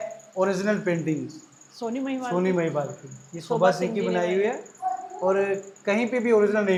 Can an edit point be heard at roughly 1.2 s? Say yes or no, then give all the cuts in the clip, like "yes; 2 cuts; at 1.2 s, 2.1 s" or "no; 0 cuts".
no; 0 cuts